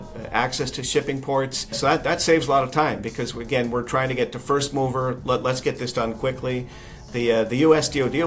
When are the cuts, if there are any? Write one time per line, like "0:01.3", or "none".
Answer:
0:01.8